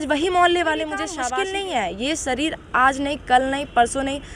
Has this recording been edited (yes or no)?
yes